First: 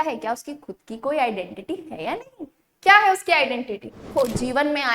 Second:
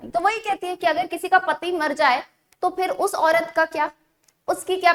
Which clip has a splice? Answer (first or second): first